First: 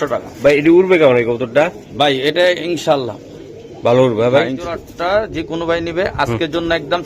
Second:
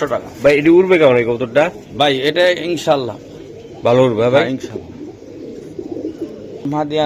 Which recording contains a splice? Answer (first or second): first